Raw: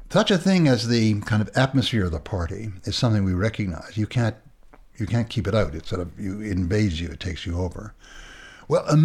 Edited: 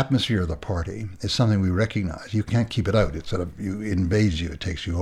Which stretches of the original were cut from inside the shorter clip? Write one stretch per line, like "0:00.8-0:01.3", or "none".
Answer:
0:04.1-0:05.1